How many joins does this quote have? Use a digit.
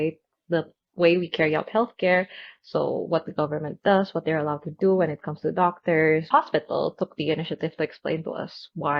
1